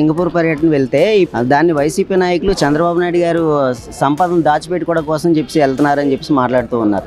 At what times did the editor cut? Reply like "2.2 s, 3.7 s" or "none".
1.3 s